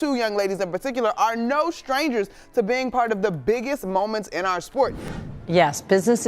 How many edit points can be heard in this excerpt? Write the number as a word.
one